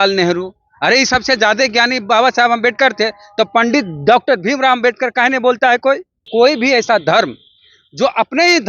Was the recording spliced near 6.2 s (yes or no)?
yes